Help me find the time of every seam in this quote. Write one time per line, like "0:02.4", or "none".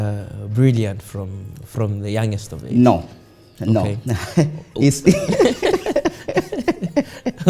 none